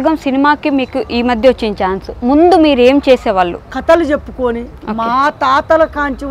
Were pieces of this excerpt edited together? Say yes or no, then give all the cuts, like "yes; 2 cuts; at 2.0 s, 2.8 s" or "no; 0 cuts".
yes; 1 cut; at 3.7 s